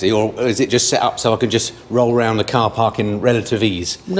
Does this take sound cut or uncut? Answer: uncut